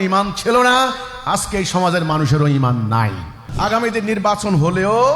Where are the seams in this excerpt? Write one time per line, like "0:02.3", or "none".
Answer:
0:03.4